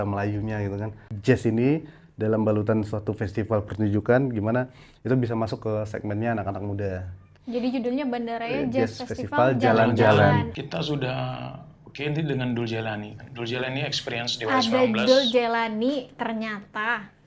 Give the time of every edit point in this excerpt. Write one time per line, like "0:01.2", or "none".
0:01.1
0:10.6